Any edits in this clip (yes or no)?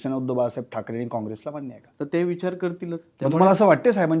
yes